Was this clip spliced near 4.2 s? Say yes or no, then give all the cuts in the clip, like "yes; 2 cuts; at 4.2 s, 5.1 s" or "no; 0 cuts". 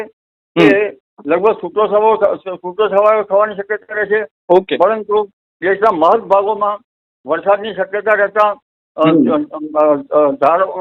no; 0 cuts